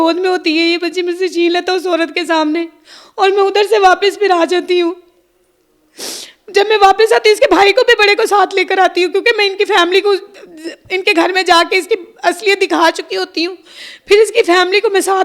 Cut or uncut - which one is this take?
uncut